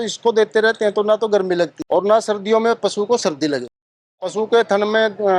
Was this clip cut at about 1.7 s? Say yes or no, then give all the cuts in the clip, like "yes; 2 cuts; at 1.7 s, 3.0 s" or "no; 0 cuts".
no; 1 cut; at 3.9 s